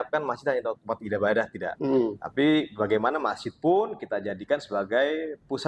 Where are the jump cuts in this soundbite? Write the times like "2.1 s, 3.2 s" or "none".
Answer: none